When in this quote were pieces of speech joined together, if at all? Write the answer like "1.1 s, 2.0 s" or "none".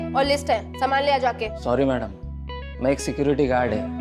none